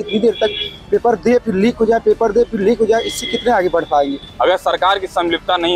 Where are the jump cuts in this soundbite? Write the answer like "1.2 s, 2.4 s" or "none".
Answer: 4.2 s